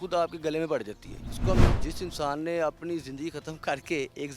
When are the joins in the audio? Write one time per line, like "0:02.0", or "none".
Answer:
0:01.6